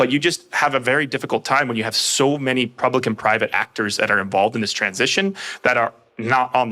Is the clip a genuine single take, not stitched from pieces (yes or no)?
yes